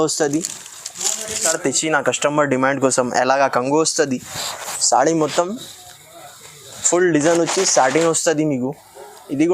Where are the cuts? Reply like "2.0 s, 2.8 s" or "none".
1.5 s